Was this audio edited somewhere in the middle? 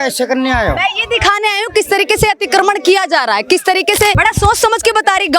yes; 1 cut; at 4.2 s

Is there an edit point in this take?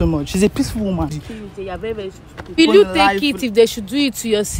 yes; 2 cuts; at 1.1 s, 2.6 s

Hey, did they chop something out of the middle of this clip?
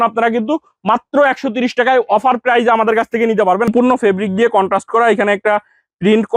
yes; 1 cut; at 3.7 s

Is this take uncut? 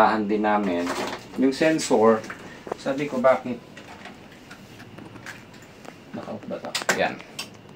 yes; 0 cuts

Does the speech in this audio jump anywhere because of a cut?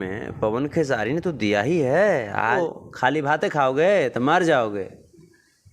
yes; 1 cut; at 2.5 s

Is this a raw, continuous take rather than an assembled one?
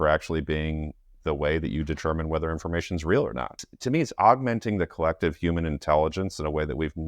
no; 1 cut; at 3.7 s

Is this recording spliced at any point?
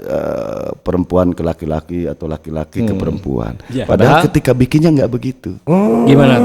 no; 0 cuts

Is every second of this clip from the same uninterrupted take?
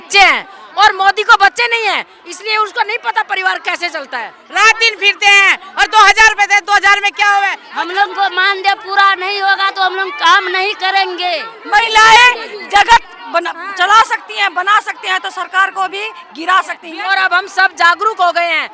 no; 4 cuts; at 4.4 s, 7.6 s, 11.5 s, 16.9 s

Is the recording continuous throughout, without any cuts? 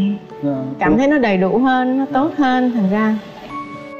yes; 0 cuts

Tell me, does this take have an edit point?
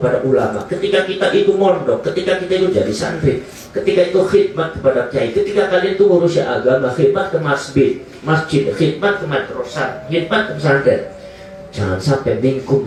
no; 0 cuts

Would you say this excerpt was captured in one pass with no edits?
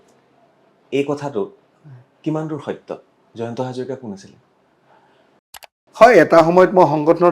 no; 1 cut; at 5.7 s

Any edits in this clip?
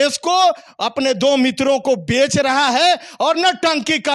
no; 0 cuts

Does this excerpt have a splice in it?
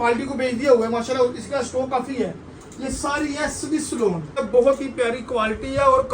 yes; 1 cut; at 4.4 s

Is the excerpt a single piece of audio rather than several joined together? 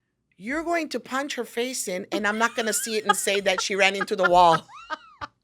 yes; 0 cuts

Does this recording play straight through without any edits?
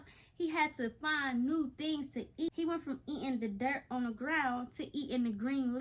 no; 1 cut; at 2.5 s

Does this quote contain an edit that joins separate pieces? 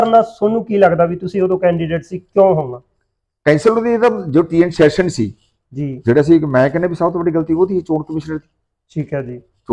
no; 0 cuts

